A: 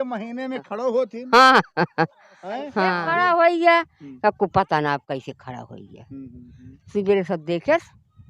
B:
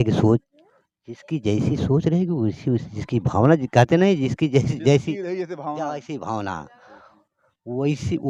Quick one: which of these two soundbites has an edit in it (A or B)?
A